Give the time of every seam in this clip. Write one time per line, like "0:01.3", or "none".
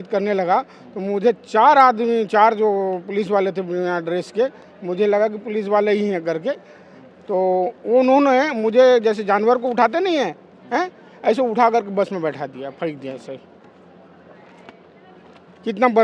none